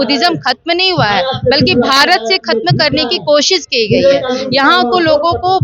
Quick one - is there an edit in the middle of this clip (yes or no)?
no